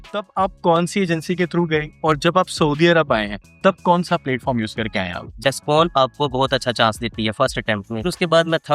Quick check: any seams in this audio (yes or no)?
yes